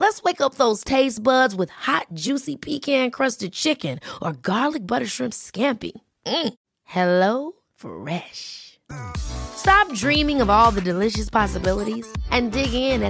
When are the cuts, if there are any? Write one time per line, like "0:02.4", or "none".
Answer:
none